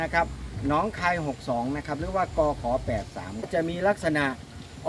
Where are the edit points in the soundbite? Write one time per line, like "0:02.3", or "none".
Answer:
0:03.5